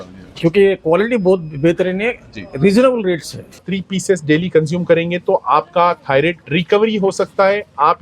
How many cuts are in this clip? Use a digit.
1